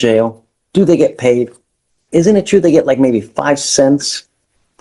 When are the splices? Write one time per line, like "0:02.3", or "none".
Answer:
none